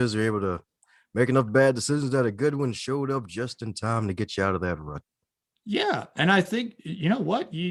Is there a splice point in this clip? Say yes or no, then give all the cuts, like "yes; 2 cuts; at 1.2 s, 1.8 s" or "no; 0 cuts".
no; 0 cuts